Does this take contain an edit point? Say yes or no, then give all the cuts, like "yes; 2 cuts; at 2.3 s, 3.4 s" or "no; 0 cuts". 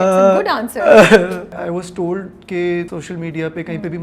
yes; 2 cuts; at 1.5 s, 2.9 s